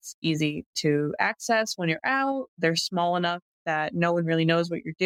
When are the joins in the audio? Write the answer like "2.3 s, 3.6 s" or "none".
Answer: none